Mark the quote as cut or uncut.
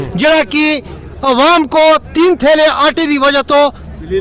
uncut